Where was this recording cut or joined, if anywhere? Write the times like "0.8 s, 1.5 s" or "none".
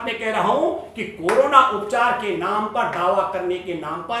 none